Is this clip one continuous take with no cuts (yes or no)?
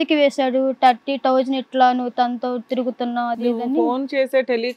yes